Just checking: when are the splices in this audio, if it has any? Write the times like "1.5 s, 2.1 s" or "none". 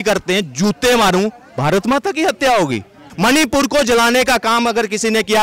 3.0 s